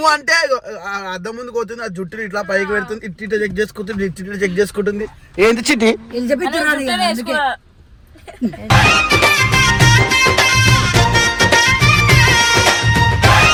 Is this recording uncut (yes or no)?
yes